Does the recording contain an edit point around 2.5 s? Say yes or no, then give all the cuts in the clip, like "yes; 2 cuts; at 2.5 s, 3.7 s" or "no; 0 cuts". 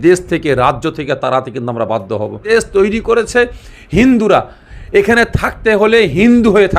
yes; 1 cut; at 2.5 s